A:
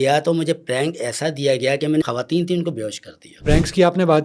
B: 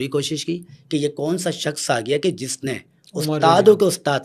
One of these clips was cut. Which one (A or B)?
A